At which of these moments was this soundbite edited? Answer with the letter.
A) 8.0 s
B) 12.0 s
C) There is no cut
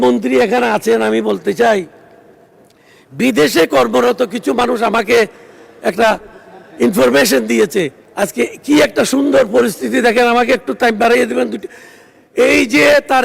A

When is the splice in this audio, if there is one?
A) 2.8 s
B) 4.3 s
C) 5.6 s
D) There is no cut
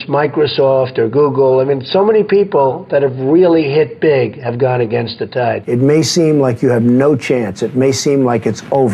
C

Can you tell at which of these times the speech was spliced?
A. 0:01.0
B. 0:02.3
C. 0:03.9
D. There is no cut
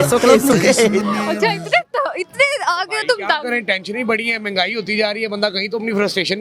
A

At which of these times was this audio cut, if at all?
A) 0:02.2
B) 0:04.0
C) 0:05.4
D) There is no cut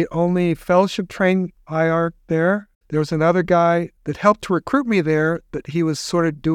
A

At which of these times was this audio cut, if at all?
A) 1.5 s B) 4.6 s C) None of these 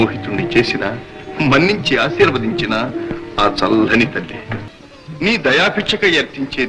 B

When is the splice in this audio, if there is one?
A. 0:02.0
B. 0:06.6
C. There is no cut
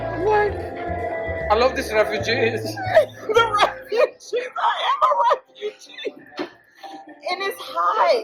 C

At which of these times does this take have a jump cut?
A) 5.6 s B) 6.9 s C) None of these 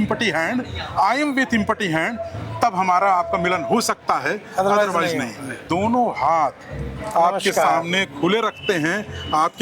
A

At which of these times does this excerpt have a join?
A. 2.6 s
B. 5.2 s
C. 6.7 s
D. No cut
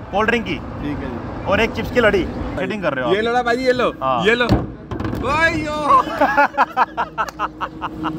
A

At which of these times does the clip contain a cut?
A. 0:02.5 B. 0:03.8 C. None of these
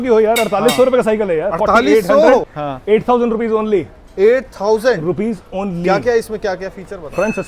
A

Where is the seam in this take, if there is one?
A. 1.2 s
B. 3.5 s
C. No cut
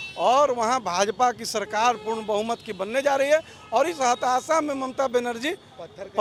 C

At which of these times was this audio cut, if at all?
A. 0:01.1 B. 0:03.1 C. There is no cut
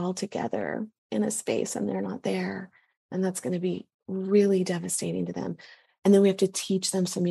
C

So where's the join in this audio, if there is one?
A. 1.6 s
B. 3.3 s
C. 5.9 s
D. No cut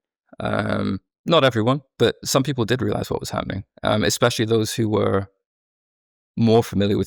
D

